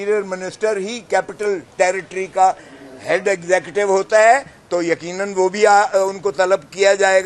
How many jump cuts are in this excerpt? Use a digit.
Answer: 0